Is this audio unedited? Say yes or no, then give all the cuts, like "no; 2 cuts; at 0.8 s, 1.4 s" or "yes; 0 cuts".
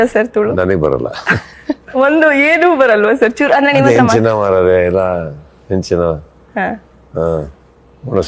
no; 1 cut; at 1.8 s